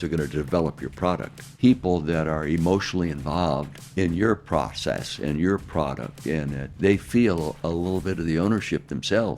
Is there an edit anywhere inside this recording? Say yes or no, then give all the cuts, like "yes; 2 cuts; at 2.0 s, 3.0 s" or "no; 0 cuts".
yes; 3 cuts; at 1.5 s, 3.8 s, 6.7 s